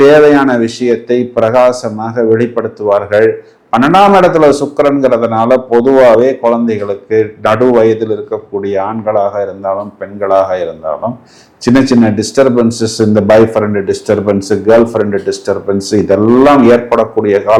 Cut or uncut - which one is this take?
uncut